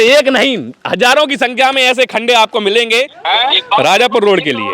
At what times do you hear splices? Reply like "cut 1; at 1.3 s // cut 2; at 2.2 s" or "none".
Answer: cut 1; at 3.1 s